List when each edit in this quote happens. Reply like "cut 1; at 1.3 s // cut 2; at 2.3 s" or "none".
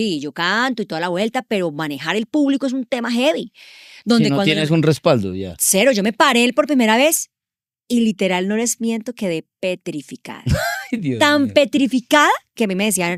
none